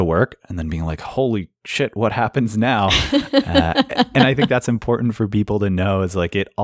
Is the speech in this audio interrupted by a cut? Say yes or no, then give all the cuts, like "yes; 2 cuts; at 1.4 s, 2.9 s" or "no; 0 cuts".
no; 0 cuts